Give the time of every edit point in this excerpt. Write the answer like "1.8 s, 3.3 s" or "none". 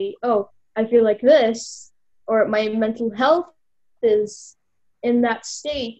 none